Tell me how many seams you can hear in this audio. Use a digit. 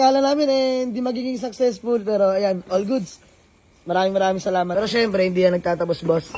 1